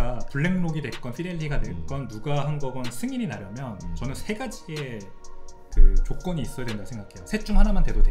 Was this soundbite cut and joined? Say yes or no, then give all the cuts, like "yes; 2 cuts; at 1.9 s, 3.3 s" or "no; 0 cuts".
no; 0 cuts